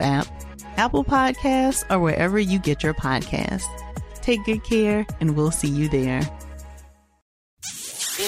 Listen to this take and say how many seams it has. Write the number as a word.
one